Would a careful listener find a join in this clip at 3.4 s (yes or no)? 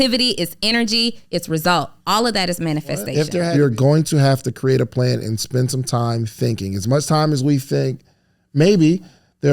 yes